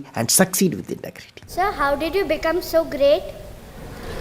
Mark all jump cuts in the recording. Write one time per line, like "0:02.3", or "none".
0:01.5